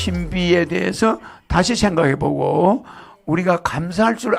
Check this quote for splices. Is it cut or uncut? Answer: uncut